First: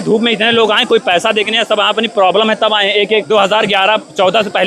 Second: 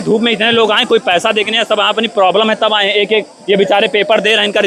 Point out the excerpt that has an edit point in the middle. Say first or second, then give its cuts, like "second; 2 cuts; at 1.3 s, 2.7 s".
first; 1 cut; at 3.2 s